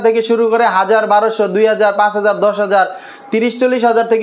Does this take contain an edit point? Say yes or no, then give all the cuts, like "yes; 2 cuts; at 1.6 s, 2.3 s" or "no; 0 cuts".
no; 0 cuts